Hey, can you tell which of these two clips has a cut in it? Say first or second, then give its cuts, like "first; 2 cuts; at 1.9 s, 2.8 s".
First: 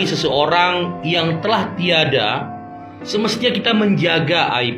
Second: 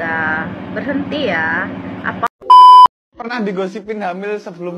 second; 2 cuts; at 2.1 s, 3.1 s